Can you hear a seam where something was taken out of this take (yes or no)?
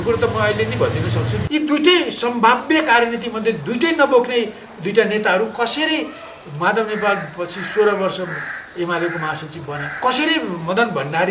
yes